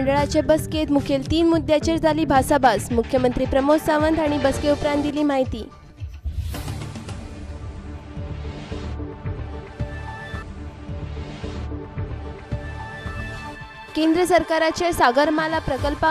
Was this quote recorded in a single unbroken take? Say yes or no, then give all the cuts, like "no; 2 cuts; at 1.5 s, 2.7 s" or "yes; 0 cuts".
yes; 0 cuts